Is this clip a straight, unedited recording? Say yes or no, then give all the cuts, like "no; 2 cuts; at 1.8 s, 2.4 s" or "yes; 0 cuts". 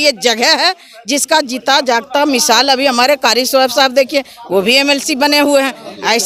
yes; 0 cuts